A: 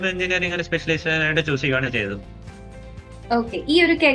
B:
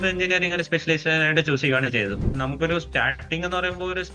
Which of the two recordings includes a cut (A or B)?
B